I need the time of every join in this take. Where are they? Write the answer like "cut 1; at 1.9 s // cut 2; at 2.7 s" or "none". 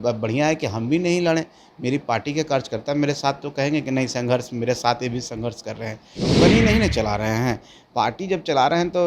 cut 1; at 6.4 s